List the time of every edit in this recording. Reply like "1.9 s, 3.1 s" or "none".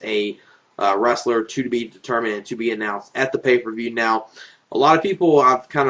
none